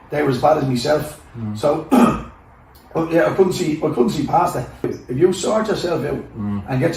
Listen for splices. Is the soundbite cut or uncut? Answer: cut